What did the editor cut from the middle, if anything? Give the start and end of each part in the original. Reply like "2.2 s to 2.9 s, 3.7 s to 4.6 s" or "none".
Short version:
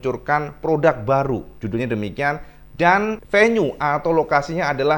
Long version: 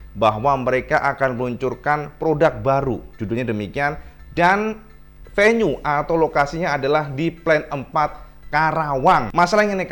4.8 s to 5.2 s